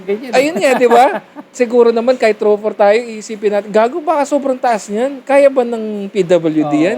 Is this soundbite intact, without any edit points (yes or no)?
no